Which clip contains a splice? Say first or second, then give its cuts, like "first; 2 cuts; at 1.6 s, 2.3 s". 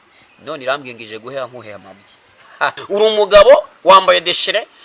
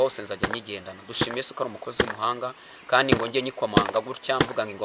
first; 1 cut; at 2.8 s